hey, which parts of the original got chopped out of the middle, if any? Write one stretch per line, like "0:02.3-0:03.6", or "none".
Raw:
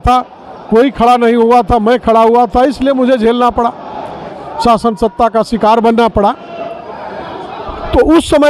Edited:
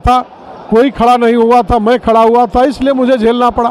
none